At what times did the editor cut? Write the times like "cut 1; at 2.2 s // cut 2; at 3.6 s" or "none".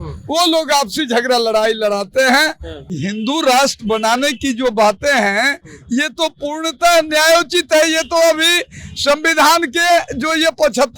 cut 1; at 2.9 s